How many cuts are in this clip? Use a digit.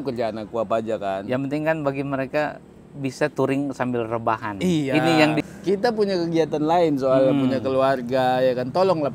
1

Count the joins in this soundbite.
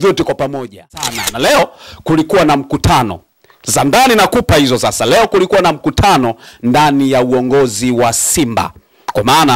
1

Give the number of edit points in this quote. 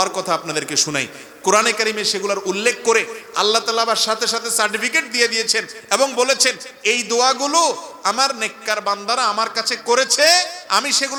0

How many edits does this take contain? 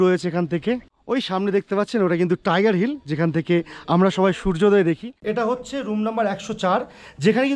2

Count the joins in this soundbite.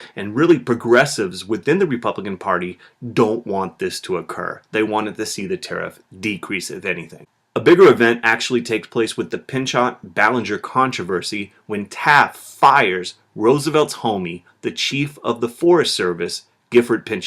1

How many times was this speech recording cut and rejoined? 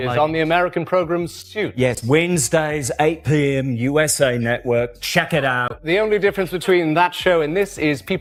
0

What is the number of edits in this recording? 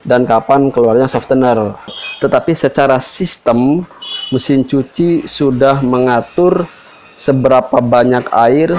1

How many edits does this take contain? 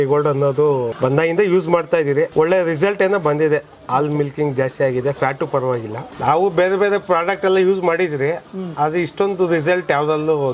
3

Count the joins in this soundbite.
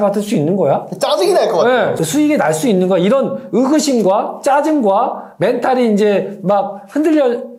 0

